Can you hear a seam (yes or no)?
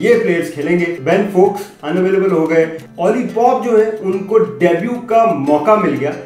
no